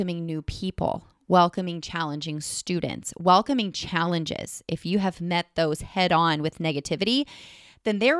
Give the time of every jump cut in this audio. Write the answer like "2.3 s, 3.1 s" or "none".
none